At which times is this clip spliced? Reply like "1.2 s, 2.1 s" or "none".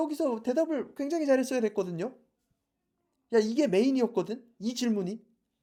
none